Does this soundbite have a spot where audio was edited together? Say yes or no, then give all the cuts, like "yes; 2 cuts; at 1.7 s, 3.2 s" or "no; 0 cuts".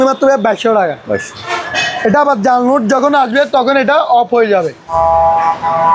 yes; 2 cuts; at 1.6 s, 4.8 s